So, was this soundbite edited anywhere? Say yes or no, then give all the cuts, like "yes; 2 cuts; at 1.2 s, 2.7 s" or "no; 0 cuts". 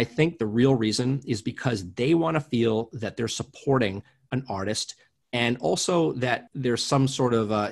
yes; 1 cut; at 6.5 s